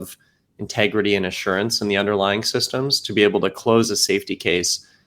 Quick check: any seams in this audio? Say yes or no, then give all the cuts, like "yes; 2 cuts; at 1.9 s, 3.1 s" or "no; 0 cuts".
no; 0 cuts